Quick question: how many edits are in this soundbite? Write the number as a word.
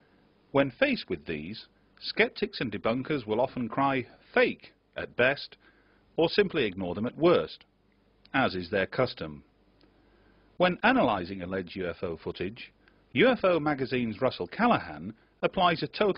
one